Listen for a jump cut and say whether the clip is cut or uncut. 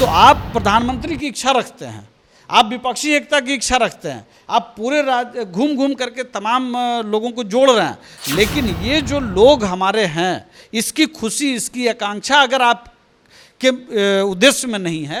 uncut